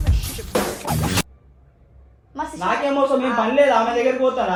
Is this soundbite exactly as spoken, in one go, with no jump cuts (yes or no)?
yes